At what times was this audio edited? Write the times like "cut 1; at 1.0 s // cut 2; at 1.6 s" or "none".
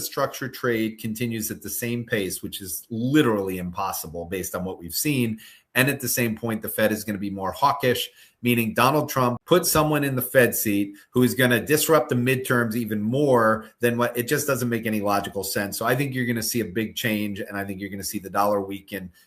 cut 1; at 9.4 s